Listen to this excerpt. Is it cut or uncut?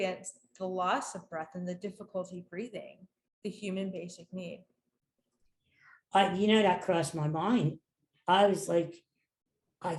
uncut